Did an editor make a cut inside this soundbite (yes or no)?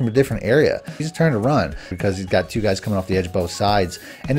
yes